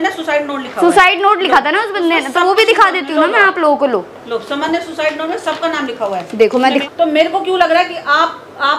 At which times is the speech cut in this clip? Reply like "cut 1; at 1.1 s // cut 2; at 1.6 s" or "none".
cut 1; at 6.7 s